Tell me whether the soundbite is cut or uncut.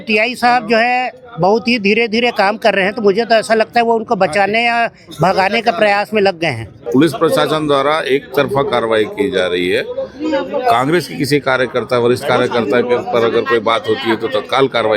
cut